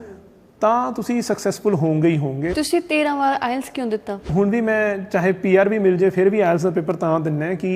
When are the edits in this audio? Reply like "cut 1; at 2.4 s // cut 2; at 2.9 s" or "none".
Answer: cut 1; at 2.5 s // cut 2; at 4.3 s